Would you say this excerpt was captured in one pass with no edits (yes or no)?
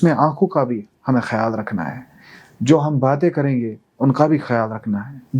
yes